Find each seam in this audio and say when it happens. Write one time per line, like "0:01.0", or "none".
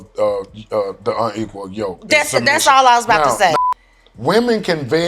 0:03.5